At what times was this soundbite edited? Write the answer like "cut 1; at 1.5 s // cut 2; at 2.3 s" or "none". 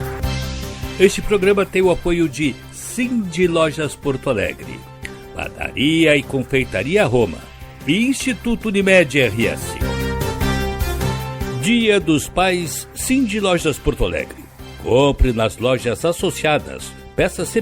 cut 1; at 0.9 s // cut 2; at 9.9 s // cut 3; at 11.6 s